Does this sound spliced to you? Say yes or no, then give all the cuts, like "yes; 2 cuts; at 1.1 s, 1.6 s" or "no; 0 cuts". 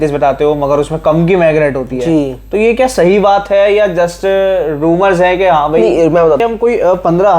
yes; 1 cut; at 6.4 s